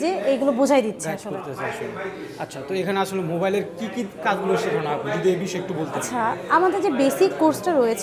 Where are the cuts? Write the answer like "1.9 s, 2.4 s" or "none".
none